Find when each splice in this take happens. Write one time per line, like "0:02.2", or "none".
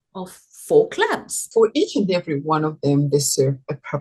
0:01.4

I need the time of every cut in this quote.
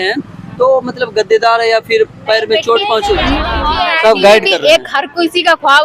0:03.5

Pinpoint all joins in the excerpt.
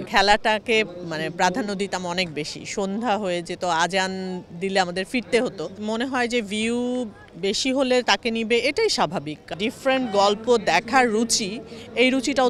0:05.7
0:09.5

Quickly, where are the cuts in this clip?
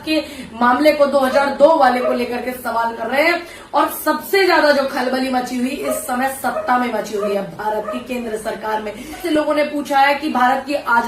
0:09.2

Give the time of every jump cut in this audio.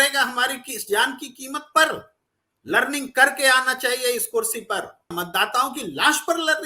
0:05.1

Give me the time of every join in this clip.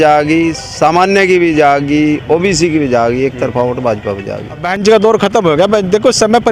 0:04.7

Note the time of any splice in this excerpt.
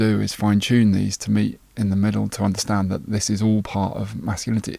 none

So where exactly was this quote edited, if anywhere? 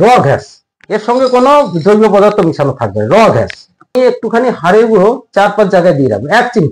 0:03.9

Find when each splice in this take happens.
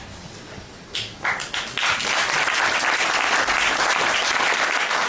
none

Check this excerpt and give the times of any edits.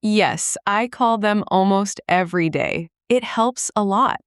none

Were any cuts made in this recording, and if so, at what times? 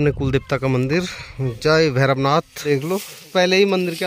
0:02.6

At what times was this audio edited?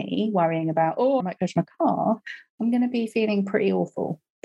0:01.2

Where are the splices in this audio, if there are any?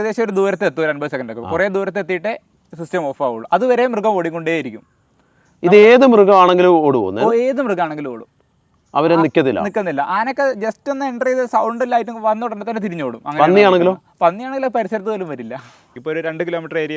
0:15.9

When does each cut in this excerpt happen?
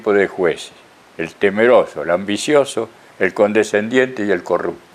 none

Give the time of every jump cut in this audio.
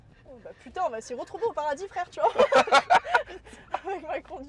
none

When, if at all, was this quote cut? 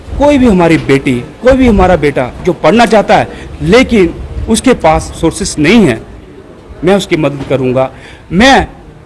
0:03.4
0:05.2

